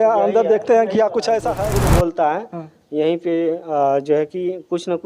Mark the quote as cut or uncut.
cut